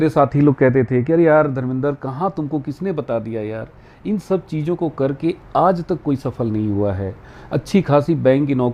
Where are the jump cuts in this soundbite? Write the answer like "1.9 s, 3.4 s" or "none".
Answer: none